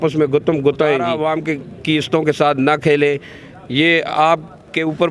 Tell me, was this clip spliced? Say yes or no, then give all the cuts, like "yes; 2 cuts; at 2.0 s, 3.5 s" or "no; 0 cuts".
yes; 1 cut; at 1.2 s